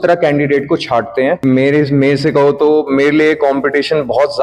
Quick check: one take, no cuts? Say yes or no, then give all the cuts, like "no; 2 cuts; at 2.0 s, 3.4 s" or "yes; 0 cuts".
no; 1 cut; at 1.4 s